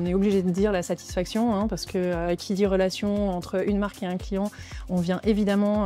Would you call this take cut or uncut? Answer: uncut